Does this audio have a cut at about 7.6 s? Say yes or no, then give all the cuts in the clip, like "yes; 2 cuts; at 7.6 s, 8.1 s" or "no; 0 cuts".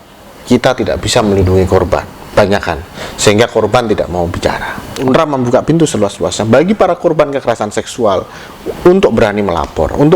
no; 1 cut; at 5.0 s